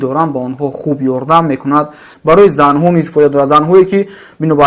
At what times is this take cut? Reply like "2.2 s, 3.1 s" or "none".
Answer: 2.0 s